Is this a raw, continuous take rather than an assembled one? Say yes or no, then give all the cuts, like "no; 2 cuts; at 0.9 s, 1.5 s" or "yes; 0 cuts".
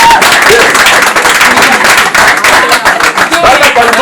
yes; 0 cuts